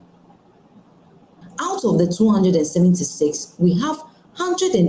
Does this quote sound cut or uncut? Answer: cut